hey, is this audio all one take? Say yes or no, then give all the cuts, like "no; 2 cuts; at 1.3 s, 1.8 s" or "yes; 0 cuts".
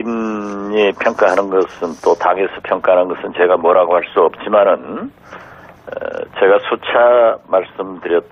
yes; 0 cuts